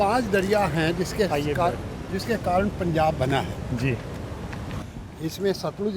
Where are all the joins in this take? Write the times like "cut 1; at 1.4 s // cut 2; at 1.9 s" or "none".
none